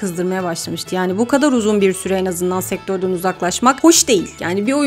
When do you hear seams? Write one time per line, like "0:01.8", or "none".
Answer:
none